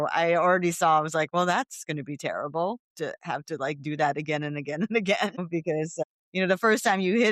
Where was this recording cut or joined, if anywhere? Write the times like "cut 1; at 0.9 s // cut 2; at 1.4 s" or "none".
cut 1; at 5.4 s